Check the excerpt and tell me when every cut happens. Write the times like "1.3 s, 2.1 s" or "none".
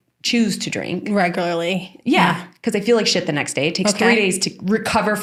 none